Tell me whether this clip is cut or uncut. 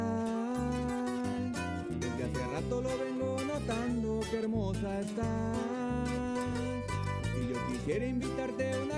uncut